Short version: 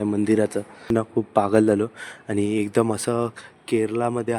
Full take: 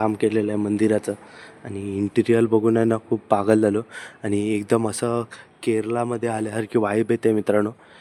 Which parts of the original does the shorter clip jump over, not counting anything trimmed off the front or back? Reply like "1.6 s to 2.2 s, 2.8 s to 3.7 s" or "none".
1.4 s to 2.9 s